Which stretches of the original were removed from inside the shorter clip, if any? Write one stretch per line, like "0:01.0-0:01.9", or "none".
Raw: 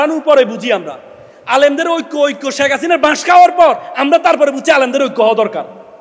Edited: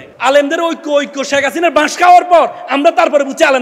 none